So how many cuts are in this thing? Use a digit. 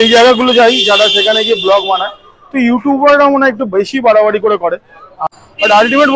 1